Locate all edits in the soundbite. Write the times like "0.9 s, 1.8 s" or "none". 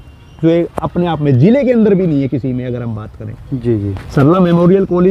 none